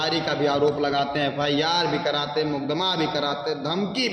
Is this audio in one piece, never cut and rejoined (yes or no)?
yes